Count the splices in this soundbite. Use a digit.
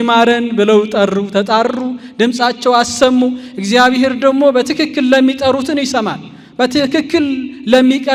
0